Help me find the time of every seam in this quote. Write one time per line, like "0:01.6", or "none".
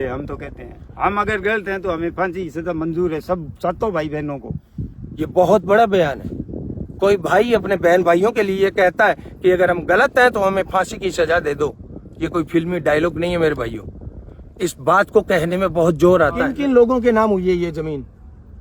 0:16.5